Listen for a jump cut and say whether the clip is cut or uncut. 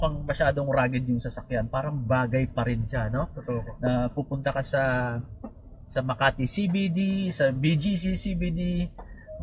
uncut